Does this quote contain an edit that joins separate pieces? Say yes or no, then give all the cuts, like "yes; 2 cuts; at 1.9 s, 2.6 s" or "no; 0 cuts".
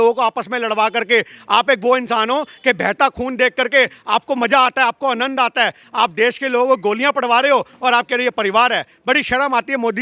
no; 0 cuts